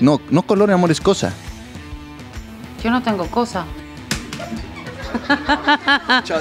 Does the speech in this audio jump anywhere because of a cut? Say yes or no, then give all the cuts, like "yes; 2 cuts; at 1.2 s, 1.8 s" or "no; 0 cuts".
no; 0 cuts